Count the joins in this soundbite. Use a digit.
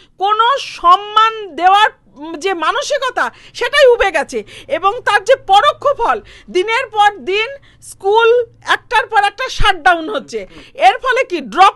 0